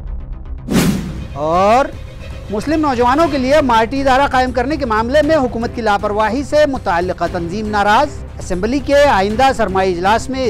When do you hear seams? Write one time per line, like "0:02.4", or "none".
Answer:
0:00.9